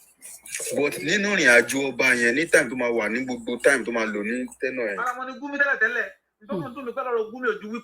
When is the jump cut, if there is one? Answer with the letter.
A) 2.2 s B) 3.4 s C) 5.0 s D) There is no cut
C